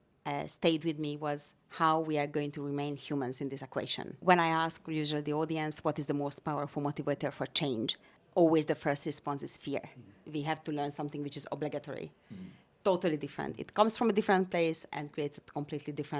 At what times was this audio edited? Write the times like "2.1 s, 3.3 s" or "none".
4.2 s, 10.1 s